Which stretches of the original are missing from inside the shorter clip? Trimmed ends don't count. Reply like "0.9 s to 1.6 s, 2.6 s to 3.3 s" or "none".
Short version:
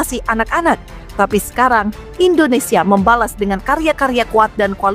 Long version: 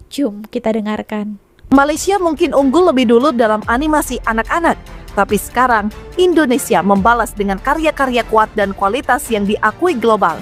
none